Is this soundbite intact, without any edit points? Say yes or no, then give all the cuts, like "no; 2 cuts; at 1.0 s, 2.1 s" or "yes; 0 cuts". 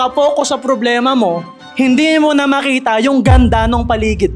yes; 0 cuts